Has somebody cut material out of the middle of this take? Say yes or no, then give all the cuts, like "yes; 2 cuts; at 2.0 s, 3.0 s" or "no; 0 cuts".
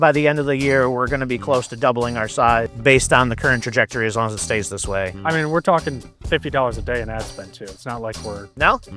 yes; 1 cut; at 5.2 s